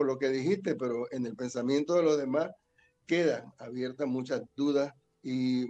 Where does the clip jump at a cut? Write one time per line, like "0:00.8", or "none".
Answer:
none

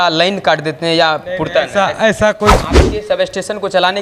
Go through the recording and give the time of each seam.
0:02.6

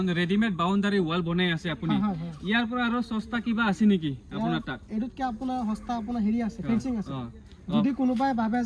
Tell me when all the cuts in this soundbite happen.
none

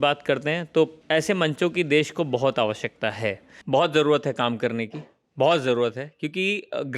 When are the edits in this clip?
0:01.0
0:03.5

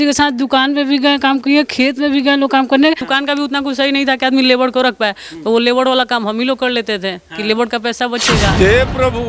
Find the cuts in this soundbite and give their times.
0:03.1
0:08.5

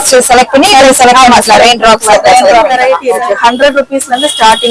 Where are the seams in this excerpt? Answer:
0:02.8

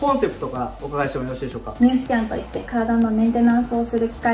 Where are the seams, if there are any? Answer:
0:01.7

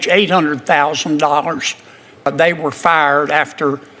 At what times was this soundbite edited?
0:02.3

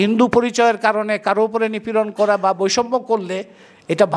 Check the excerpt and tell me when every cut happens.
none

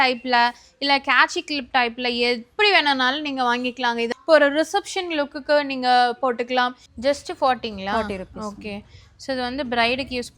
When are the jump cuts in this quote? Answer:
0:04.1
0:06.8

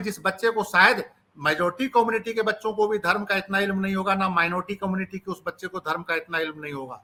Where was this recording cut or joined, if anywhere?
none

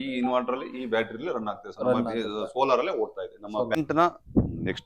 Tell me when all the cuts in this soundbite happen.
0:03.8

